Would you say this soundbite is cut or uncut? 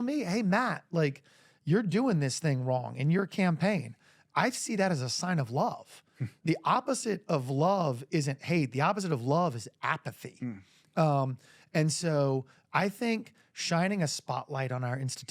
cut